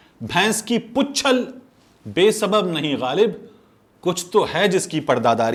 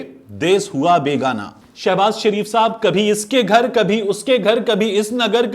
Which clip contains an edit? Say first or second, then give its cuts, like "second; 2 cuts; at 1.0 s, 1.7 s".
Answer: second; 1 cut; at 1.5 s